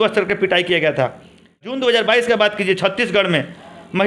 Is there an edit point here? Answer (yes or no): yes